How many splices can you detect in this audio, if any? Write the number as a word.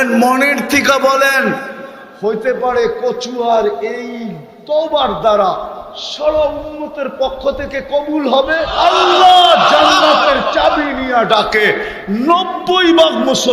one